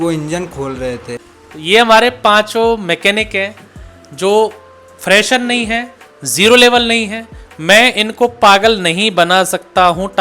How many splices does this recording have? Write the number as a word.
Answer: one